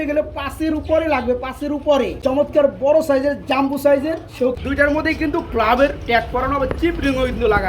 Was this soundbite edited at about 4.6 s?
yes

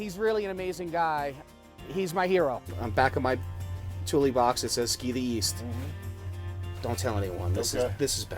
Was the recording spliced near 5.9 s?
no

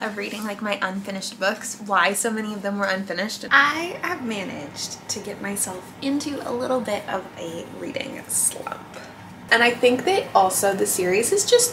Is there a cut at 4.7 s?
no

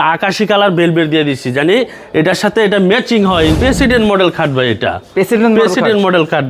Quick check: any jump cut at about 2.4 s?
no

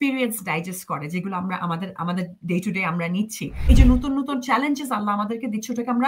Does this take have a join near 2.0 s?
no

